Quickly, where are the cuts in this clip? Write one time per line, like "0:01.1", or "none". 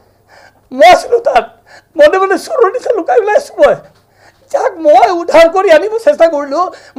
none